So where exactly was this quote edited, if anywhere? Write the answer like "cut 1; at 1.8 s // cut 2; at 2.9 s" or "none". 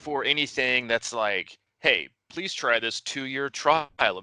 cut 1; at 1.6 s